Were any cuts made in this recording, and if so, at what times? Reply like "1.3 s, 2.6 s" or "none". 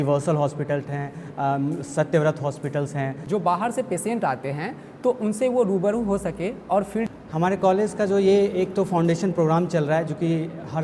3.2 s, 7.1 s